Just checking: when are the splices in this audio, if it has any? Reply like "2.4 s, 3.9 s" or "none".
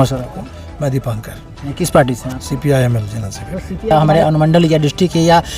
3.9 s